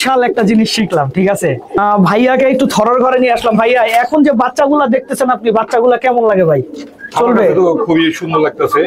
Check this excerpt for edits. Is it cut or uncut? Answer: uncut